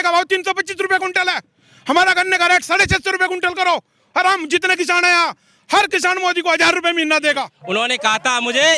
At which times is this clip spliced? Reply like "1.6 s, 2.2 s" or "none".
7.6 s

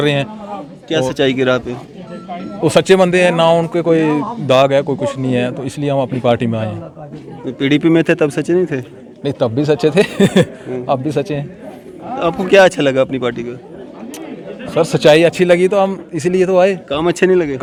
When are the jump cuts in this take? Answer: none

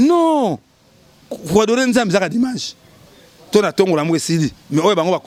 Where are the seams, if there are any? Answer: none

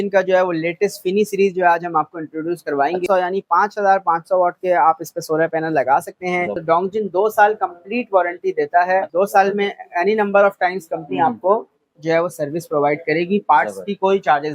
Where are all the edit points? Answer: 3.0 s, 6.5 s, 9.1 s

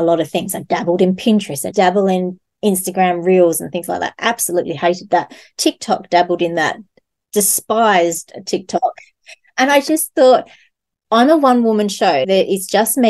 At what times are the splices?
1.7 s

